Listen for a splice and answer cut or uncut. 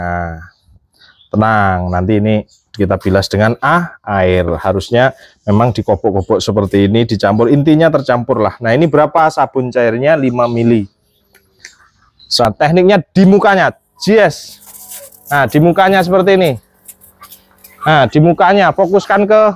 cut